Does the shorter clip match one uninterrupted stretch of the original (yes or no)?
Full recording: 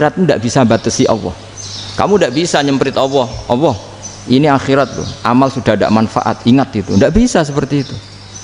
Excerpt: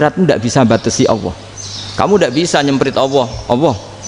yes